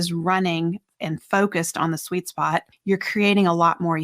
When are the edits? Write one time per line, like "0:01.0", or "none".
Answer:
0:02.7